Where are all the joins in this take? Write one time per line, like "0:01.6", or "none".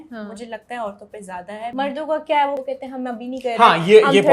0:01.7
0:02.6